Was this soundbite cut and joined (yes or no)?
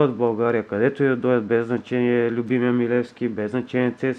no